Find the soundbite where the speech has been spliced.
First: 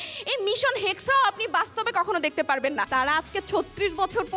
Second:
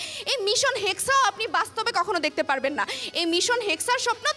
first; 1 cut; at 2.9 s

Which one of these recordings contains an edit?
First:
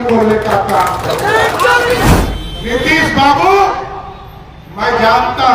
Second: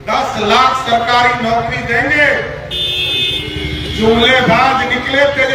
first; 1 cut; at 2.1 s

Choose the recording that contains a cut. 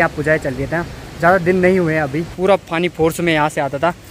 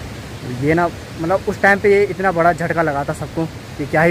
first; 1 cut; at 2.2 s

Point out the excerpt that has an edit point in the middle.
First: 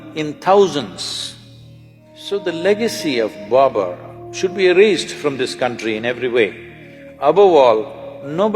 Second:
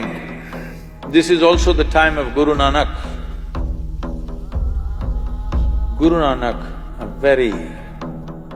first; 1 cut; at 2.1 s

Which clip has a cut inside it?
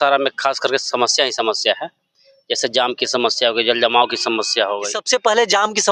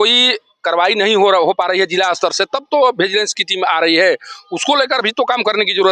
first; 1 cut; at 4.9 s

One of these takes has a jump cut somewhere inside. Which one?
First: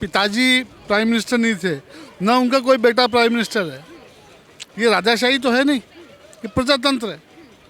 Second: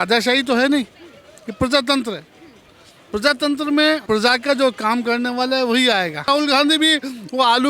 second; 2 cuts; at 4.0 s, 6.3 s

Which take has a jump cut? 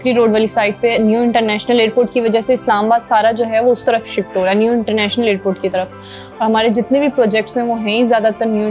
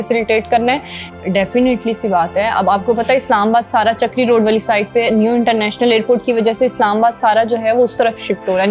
second; 1 cut; at 1.0 s

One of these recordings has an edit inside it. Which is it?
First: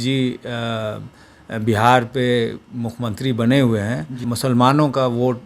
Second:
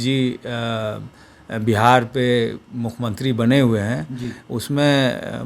first; 1 cut; at 4.2 s

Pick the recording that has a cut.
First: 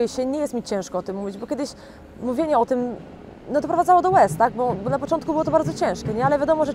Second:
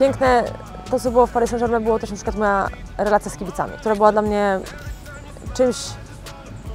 second; 1 cut; at 3.7 s

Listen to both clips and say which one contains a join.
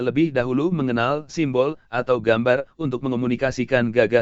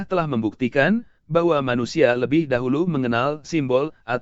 first; 1 cut; at 3.0 s

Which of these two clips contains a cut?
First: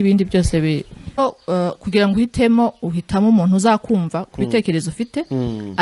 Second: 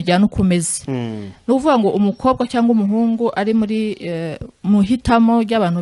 first; 1 cut; at 1.2 s

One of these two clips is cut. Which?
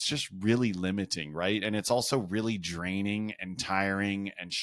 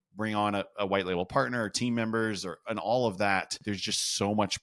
second; 1 cut; at 3.6 s

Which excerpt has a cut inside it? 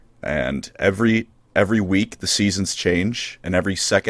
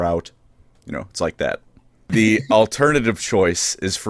second; 1 cut; at 2.0 s

